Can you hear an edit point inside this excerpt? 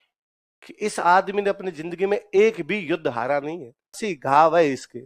yes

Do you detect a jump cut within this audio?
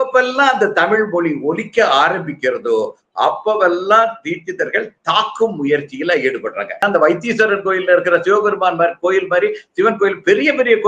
yes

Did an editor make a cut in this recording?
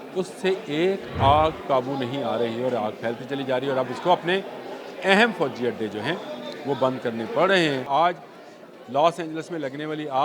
yes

